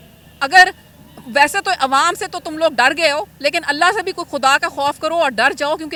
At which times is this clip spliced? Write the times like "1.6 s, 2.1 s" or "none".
none